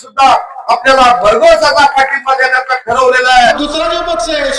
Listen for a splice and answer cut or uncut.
cut